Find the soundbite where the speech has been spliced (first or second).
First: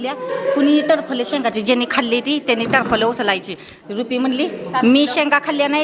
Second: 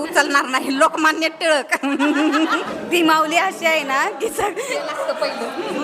second